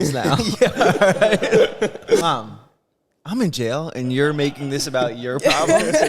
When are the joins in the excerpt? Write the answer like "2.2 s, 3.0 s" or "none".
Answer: 2.2 s